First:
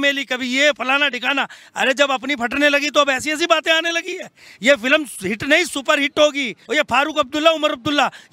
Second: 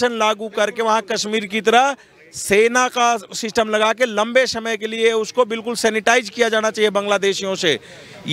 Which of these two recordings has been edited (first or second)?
first